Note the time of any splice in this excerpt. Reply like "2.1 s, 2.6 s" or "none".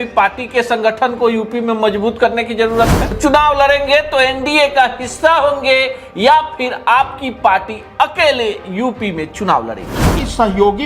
3.2 s, 10.1 s